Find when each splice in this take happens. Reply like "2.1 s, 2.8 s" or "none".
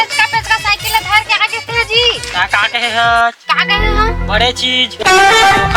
none

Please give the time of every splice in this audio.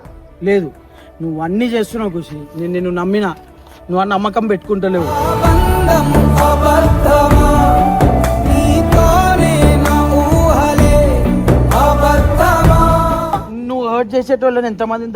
13.5 s

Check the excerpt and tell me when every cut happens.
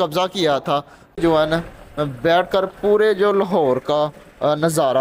1.2 s

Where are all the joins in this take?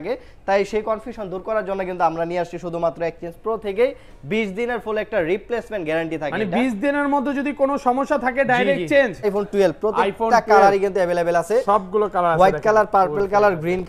9.2 s

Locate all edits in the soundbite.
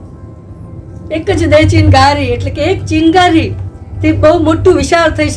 none

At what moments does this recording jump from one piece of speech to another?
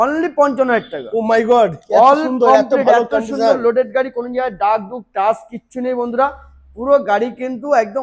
none

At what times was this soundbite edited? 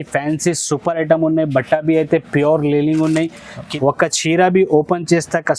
3.6 s

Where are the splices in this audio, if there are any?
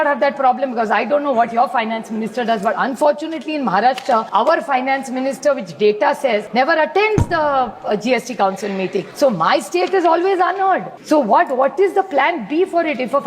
4.3 s, 6.5 s, 9.1 s, 10.9 s

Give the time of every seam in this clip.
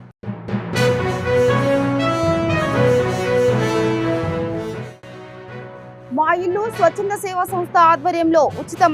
5.9 s

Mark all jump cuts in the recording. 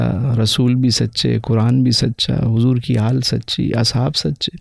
none

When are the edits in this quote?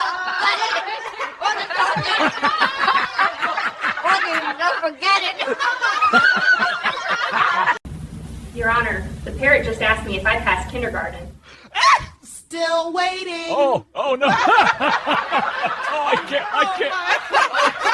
none

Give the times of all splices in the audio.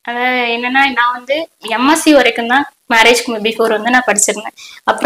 none

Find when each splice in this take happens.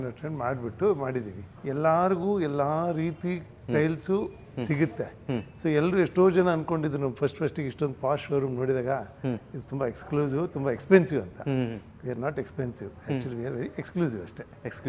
1.5 s

